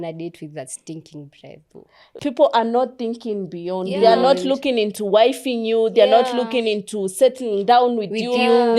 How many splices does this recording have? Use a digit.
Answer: 1